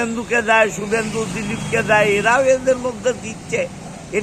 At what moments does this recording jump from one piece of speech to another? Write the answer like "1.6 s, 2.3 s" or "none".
none